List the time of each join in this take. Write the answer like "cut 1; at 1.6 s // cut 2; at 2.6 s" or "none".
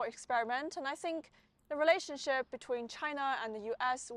none